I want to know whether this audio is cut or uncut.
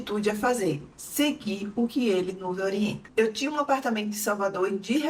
uncut